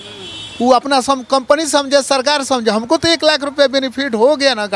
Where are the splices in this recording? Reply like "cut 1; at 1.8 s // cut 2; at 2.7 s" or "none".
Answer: none